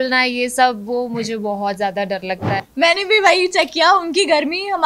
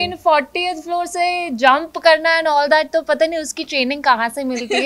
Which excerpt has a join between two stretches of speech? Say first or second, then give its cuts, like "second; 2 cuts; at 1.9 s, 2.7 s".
first; 1 cut; at 2.7 s